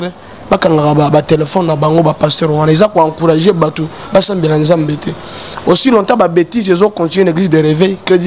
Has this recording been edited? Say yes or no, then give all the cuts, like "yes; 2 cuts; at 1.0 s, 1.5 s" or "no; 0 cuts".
no; 0 cuts